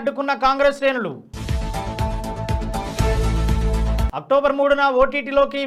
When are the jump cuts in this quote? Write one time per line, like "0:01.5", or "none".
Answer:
none